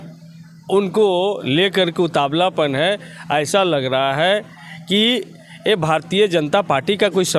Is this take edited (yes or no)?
no